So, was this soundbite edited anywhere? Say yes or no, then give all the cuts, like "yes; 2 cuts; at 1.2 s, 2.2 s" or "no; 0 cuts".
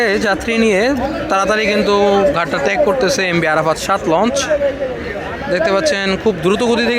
no; 0 cuts